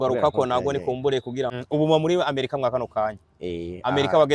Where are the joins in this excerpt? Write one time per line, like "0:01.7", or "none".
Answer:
0:01.5